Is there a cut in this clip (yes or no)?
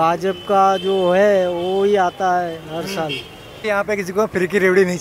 yes